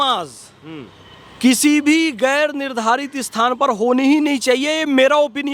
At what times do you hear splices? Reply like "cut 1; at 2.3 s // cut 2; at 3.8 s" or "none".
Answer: none